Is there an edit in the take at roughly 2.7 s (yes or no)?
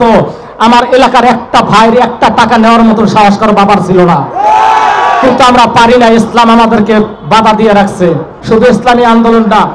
no